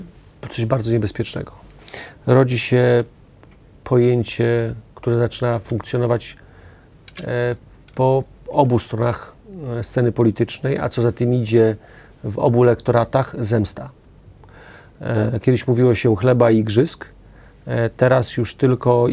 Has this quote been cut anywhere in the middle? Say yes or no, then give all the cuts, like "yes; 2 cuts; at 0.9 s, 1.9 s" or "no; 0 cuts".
no; 0 cuts